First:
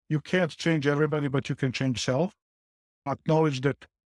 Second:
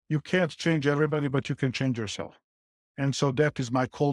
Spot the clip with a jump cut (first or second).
first